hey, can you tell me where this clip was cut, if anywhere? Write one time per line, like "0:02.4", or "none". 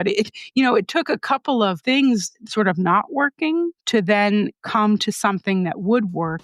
0:03.8